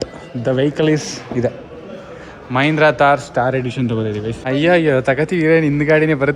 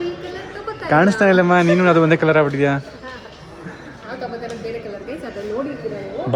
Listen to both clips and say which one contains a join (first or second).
first